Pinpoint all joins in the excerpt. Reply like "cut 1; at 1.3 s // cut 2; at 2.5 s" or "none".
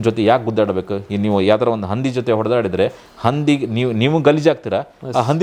none